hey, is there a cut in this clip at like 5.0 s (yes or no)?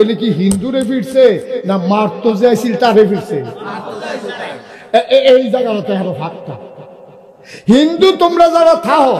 no